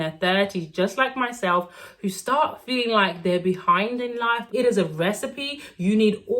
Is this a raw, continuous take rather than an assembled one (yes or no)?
no